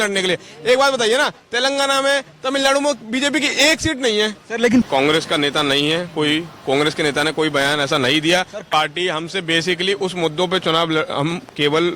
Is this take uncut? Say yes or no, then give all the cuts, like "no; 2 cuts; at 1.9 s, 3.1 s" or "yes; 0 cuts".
no; 2 cuts; at 4.8 s, 8.7 s